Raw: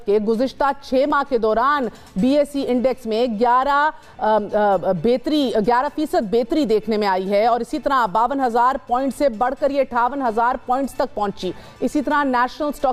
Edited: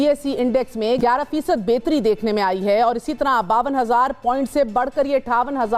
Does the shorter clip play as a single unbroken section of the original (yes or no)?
no